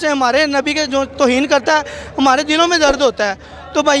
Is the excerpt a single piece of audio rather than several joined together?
yes; 0 cuts

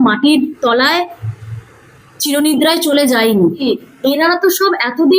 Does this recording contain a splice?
no; 0 cuts

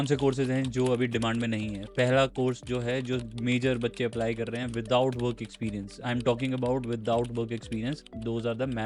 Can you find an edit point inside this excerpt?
no; 0 cuts

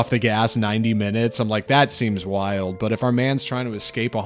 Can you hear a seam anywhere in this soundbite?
no; 0 cuts

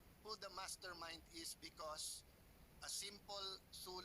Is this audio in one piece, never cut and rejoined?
yes; 0 cuts

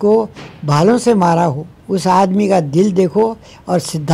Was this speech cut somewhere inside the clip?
no; 0 cuts

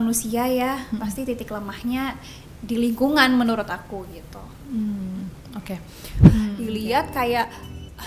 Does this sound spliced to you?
no; 0 cuts

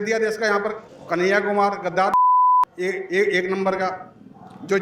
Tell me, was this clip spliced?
no; 0 cuts

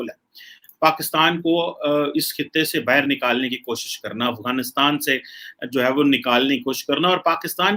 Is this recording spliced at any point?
no; 0 cuts

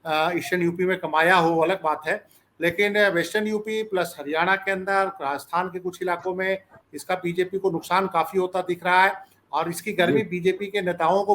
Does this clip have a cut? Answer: no; 0 cuts

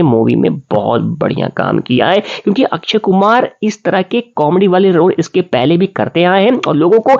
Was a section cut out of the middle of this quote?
no; 0 cuts

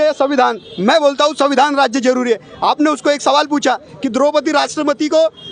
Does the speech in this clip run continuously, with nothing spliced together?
yes; 0 cuts

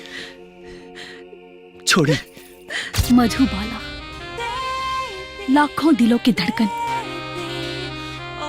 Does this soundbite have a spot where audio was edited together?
yes; 1 cut; at 2.9 s

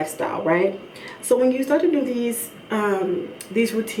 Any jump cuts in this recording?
no; 0 cuts

